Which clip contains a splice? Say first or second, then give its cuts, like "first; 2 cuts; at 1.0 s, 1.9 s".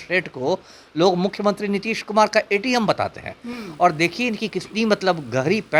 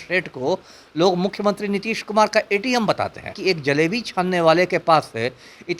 second; 1 cut; at 3.4 s